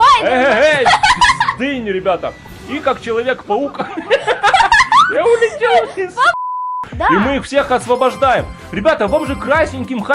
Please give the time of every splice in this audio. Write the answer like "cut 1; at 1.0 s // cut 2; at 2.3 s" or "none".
cut 1; at 6.4 s